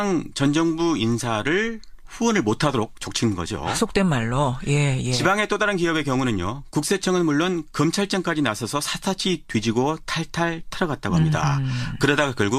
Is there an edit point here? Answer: yes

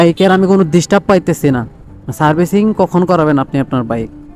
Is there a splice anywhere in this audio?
no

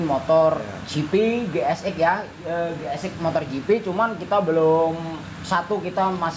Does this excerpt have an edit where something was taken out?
no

